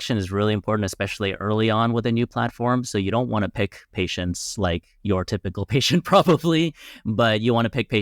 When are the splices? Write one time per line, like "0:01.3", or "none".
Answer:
none